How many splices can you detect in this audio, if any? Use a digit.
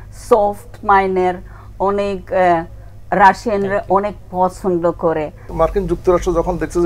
1